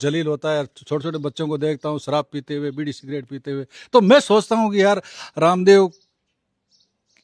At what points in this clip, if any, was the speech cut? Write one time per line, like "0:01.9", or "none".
none